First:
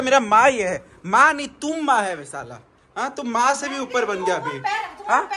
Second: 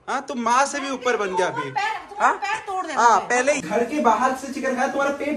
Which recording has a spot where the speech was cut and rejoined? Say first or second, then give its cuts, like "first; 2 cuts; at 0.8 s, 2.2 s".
second; 1 cut; at 3.6 s